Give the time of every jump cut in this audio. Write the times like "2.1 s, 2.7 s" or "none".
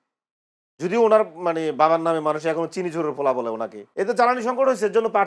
3.8 s